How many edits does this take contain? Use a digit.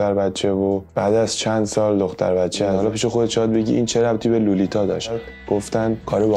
2